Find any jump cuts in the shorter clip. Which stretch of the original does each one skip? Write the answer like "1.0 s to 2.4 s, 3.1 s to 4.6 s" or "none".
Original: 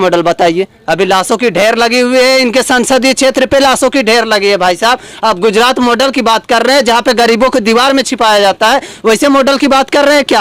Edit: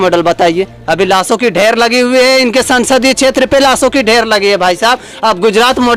none